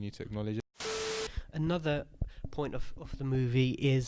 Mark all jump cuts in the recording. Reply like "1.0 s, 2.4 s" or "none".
1.1 s